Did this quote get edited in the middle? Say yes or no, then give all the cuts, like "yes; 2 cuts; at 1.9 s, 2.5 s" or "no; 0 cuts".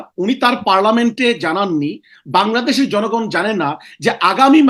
no; 0 cuts